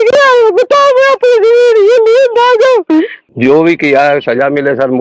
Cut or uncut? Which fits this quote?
cut